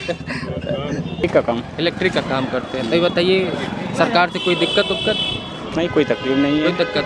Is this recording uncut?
no; 1 cut; at 1.2 s

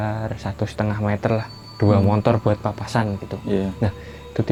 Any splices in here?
no; 0 cuts

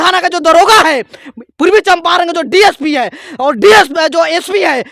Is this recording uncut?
yes; 0 cuts

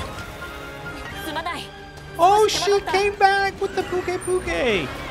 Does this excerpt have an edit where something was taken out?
yes; 1 cut; at 1.1 s

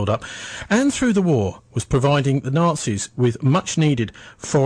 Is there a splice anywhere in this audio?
no; 0 cuts

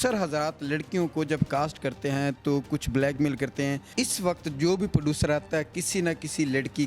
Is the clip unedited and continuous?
no; 1 cut; at 3.8 s

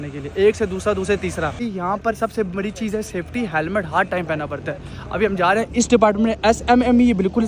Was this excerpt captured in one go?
no; 1 cut; at 1.4 s

